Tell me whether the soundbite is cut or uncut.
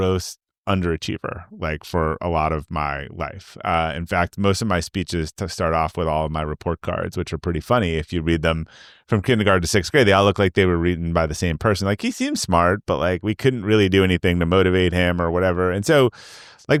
uncut